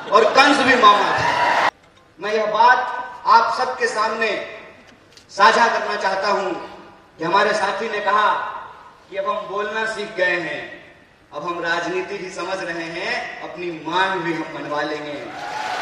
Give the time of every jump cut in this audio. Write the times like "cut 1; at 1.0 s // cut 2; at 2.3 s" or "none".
cut 1; at 1.7 s